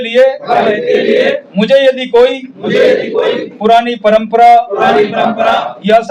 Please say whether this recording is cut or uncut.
uncut